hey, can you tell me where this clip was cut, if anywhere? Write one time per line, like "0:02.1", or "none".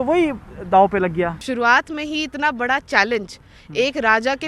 0:01.4